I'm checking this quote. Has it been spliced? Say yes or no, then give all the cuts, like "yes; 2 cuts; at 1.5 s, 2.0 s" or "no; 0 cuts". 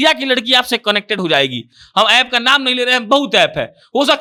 no; 0 cuts